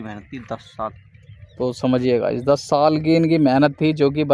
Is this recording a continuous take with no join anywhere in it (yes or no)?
yes